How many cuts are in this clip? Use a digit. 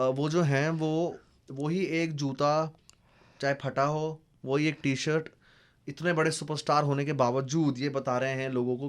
0